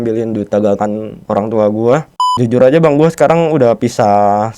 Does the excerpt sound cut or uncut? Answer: cut